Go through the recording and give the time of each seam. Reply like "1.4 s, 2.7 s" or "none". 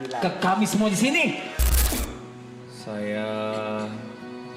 1.9 s